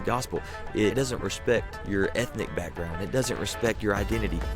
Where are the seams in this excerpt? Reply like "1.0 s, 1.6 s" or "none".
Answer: 0.9 s, 1.8 s